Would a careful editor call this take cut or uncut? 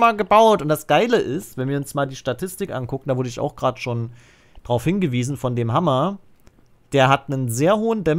uncut